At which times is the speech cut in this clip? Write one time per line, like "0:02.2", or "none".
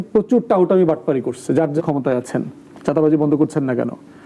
0:01.8